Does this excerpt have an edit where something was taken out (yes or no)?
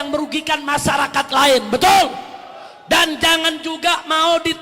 no